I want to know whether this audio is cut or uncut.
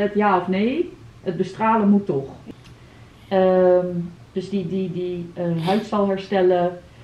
cut